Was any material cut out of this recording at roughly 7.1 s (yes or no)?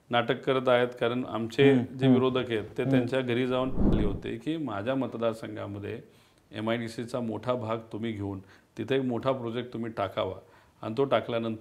no